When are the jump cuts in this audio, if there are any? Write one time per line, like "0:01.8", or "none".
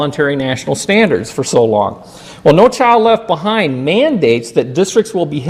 none